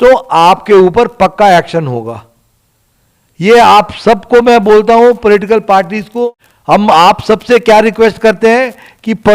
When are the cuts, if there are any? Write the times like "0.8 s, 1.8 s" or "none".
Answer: 6.2 s